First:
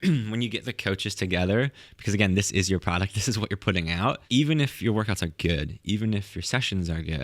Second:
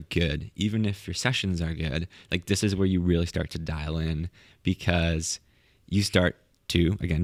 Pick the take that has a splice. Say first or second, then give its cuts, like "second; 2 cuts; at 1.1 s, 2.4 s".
first; 1 cut; at 4.2 s